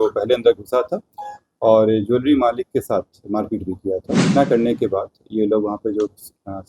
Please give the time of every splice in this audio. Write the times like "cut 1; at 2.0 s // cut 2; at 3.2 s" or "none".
cut 1; at 4.2 s